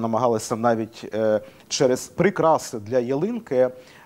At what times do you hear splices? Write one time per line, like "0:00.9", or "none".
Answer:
0:02.1